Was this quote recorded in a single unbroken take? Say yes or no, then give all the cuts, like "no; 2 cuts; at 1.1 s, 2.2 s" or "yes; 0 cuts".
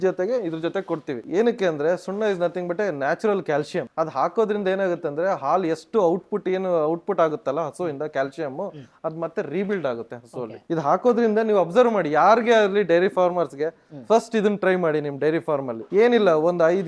yes; 0 cuts